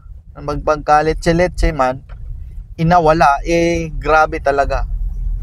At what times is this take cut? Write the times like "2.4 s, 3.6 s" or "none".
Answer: none